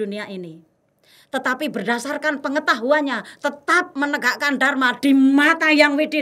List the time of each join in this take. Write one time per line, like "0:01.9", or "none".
none